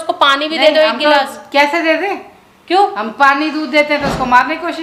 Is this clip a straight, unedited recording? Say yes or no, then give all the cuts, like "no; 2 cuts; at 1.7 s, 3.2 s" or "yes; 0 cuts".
yes; 0 cuts